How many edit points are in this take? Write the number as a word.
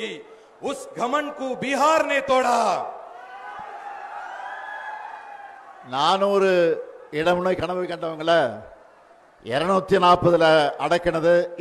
zero